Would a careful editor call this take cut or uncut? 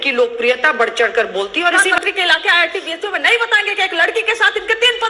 cut